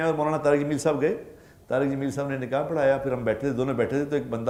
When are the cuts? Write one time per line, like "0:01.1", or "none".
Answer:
none